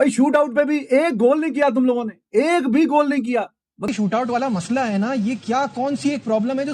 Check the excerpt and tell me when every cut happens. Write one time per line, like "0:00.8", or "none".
0:03.9